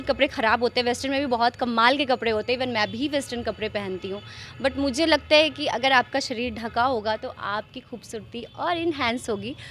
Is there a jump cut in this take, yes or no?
no